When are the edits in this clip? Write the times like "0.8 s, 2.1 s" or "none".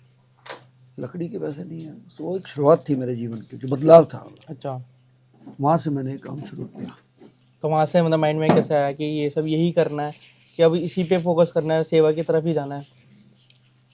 none